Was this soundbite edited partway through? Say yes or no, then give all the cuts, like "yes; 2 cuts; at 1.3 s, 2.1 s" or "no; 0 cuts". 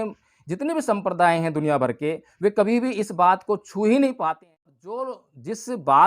yes; 1 cut; at 4.3 s